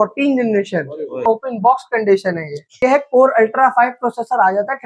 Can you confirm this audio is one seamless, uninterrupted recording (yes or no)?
no